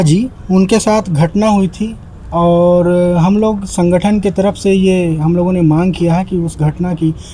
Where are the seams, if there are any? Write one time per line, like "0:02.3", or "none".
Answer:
none